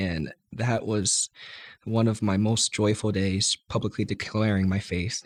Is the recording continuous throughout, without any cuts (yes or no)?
yes